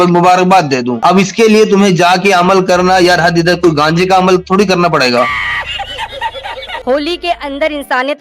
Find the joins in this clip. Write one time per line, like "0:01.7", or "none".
0:06.8